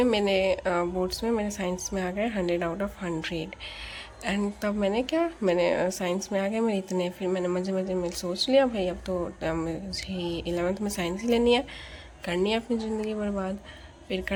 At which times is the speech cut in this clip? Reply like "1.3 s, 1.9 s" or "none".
none